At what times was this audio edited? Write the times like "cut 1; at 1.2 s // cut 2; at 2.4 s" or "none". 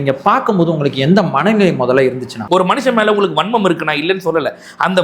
cut 1; at 2.4 s